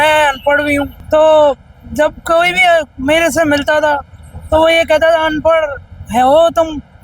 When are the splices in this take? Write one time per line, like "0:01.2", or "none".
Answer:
0:01.0